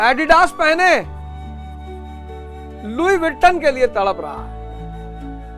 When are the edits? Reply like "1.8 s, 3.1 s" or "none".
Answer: 1.0 s, 2.8 s, 4.7 s